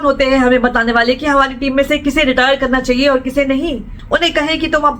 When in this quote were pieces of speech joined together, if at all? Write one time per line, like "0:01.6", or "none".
0:03.9